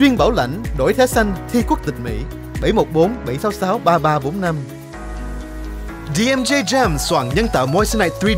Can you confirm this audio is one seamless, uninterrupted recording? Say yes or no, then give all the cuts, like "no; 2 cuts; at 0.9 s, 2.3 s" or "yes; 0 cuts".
yes; 0 cuts